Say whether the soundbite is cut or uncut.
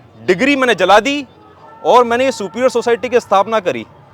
uncut